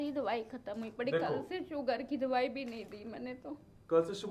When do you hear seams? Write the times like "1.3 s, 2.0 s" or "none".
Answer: none

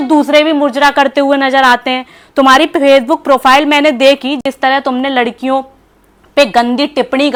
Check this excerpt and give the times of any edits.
none

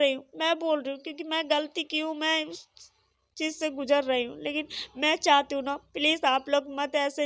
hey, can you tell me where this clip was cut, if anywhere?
none

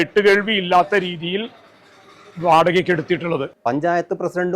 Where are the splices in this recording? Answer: 3.5 s

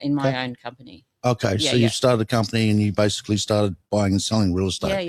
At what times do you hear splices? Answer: none

